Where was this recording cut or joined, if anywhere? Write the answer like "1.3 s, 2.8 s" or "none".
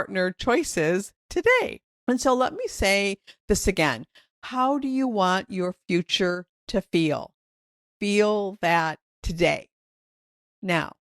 1.9 s